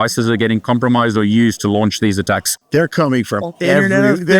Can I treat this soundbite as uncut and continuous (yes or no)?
yes